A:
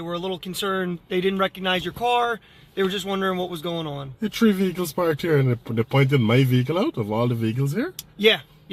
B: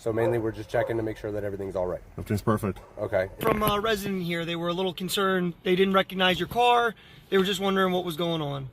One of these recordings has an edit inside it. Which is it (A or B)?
B